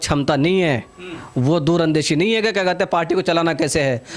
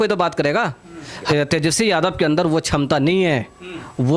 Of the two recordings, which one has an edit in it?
second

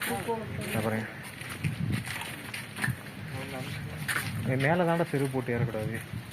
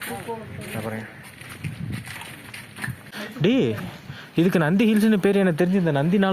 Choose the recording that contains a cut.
second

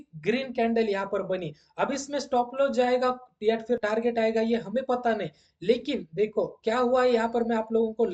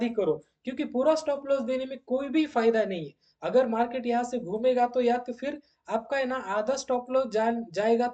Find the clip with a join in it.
first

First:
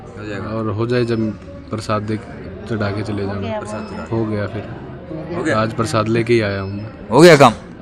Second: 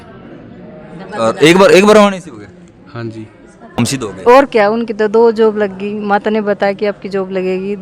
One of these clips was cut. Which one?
second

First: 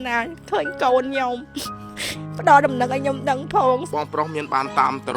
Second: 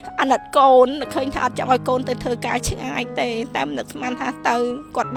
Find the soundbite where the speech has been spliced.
first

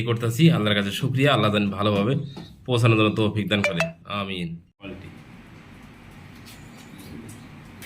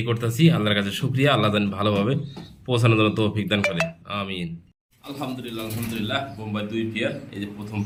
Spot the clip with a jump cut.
first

